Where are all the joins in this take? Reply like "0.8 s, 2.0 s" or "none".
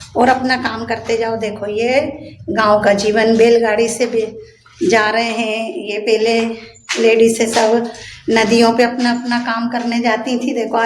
none